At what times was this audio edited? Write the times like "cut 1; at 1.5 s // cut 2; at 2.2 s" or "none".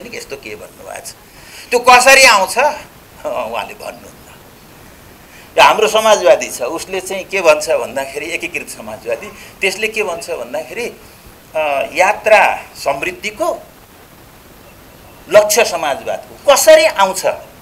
none

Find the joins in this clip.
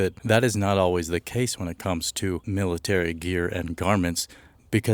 none

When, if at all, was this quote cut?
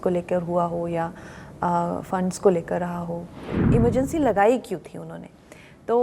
cut 1; at 3.5 s

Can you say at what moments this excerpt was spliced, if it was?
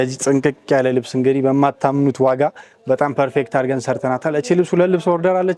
none

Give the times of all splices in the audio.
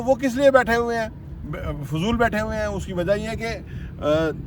none

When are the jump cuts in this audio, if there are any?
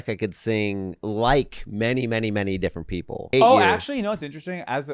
cut 1; at 1.0 s // cut 2; at 3.3 s

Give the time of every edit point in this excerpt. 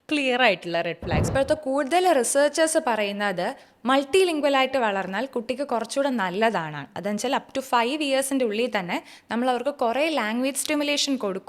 cut 1; at 1.3 s

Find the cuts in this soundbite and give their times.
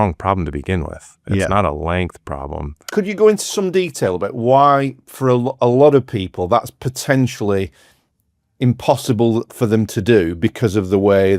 cut 1; at 2.8 s

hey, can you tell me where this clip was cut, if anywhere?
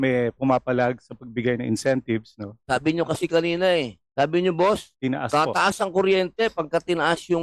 cut 1; at 4.0 s // cut 2; at 4.9 s

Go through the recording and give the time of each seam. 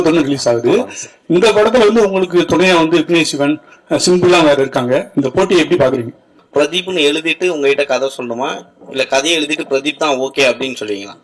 cut 1; at 6.4 s

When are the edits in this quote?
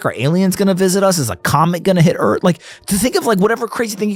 none

